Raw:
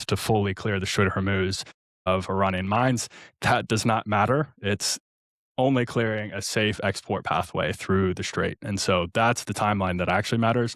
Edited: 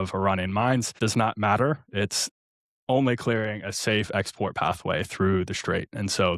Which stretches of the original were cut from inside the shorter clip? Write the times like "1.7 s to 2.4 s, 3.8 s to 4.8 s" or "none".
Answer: 3.1 s to 3.6 s